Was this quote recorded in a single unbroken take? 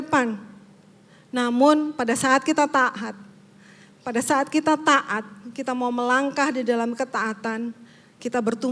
yes; 0 cuts

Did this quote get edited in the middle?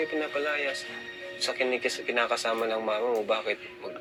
no; 0 cuts

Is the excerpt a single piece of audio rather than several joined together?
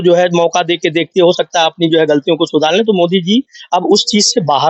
yes; 0 cuts

